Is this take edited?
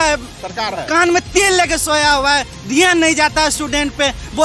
no; 0 cuts

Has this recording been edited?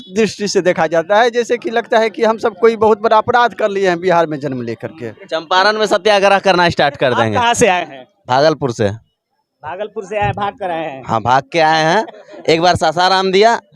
yes; 1 cut; at 5.0 s

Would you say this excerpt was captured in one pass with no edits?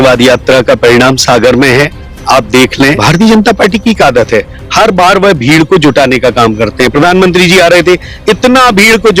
no; 1 cut; at 3.0 s

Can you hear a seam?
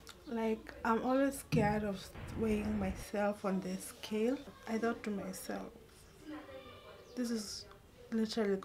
yes; 1 cut; at 4.6 s

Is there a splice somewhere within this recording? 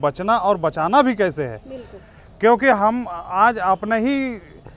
no; 0 cuts

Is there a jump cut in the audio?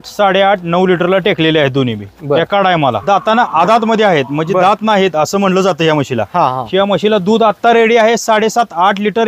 yes; 1 cut; at 2.9 s

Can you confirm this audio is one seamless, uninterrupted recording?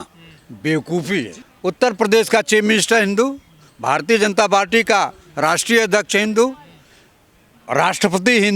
no; 1 cut; at 1.4 s

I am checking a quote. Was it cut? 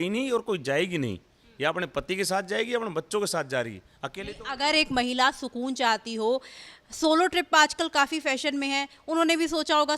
no; 0 cuts

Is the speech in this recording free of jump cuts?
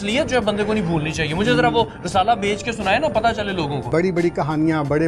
no; 1 cut; at 3.8 s

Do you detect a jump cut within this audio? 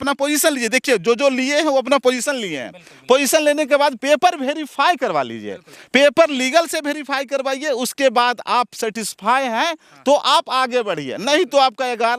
no; 0 cuts

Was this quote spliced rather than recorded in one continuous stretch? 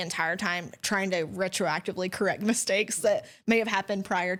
no; 0 cuts

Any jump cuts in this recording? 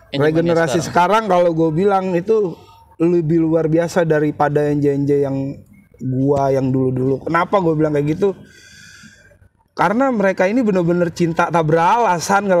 no; 0 cuts

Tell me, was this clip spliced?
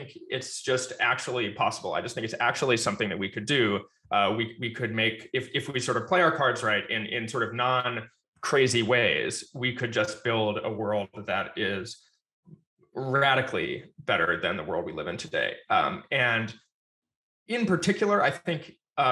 no; 0 cuts

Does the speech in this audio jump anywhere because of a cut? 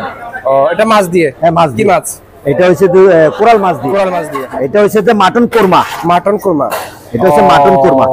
yes; 1 cut; at 4.4 s

